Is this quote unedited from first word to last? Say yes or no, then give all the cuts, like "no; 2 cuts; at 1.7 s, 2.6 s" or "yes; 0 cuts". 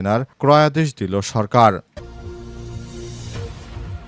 no; 1 cut; at 1.9 s